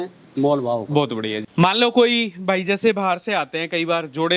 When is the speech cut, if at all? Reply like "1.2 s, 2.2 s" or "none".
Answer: 1.4 s